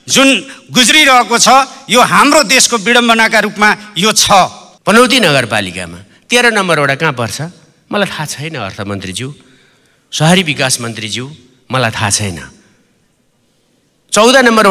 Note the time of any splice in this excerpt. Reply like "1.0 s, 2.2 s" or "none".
4.7 s